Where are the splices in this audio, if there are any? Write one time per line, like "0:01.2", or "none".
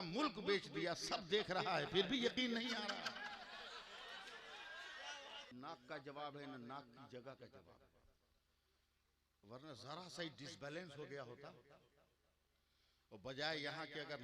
0:05.5